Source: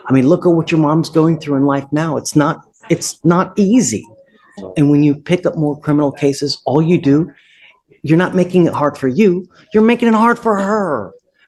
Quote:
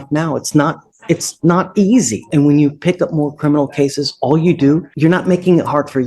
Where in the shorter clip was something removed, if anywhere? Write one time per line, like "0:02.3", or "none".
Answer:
0:02.2
0:04.9